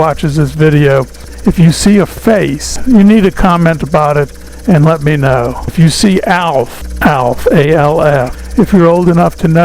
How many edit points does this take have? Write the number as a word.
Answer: five